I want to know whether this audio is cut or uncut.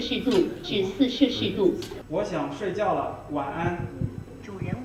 uncut